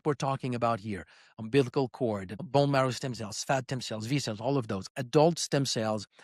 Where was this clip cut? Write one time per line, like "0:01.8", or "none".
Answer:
0:02.5

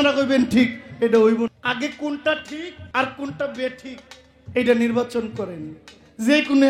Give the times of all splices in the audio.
0:01.6
0:02.8

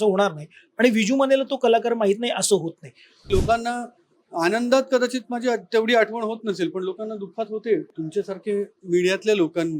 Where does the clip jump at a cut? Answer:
0:03.2
0:08.0

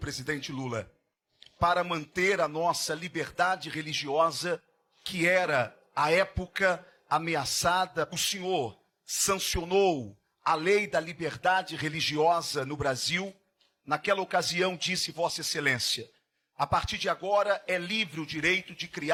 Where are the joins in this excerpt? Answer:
none

